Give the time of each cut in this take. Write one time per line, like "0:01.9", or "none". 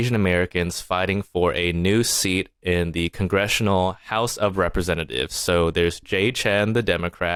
none